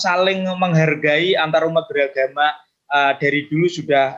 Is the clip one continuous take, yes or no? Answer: yes